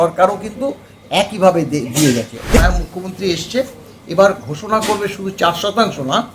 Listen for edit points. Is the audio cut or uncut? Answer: cut